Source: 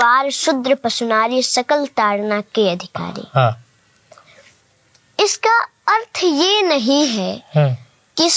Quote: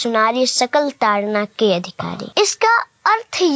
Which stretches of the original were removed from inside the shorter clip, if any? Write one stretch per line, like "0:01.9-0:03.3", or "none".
0:03.2-0:05.0